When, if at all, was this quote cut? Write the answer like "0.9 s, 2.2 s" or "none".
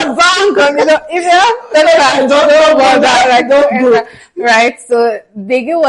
none